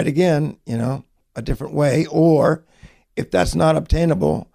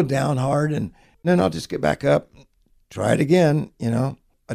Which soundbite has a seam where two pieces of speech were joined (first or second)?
second